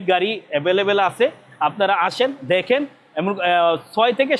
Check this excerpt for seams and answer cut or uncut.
uncut